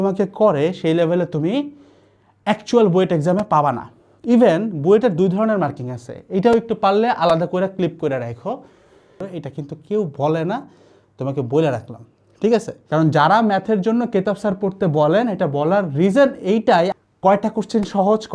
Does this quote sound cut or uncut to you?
cut